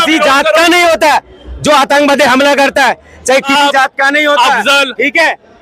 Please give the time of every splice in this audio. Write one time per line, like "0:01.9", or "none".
0:03.5